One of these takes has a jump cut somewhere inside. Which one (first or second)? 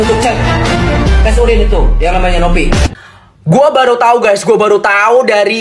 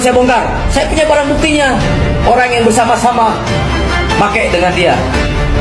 first